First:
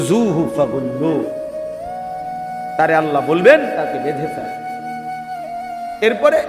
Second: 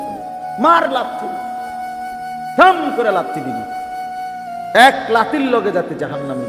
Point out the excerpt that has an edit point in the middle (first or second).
second